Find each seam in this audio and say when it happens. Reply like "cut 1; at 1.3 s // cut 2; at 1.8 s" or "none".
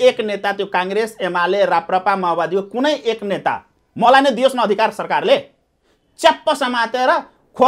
none